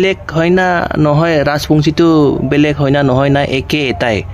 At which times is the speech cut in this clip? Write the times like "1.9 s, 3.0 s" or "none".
none